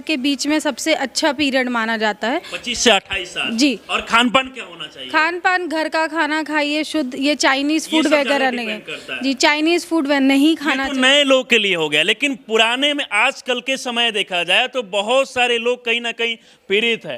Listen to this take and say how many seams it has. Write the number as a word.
zero